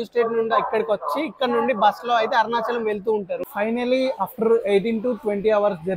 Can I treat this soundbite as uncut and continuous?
no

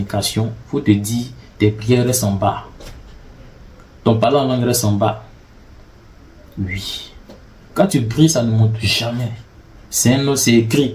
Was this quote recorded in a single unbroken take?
yes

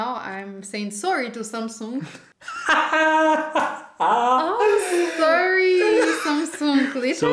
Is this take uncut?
no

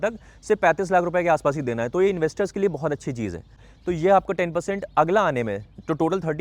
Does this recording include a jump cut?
yes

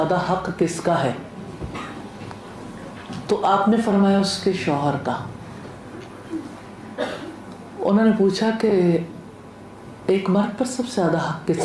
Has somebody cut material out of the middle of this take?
no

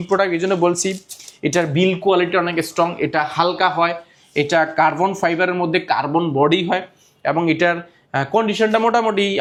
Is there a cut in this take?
no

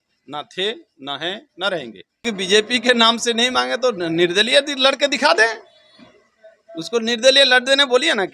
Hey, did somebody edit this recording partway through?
yes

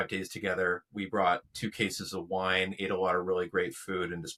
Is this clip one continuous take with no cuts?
yes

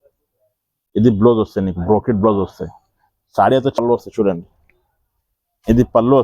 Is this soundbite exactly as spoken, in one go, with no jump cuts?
no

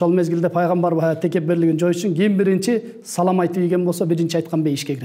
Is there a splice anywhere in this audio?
no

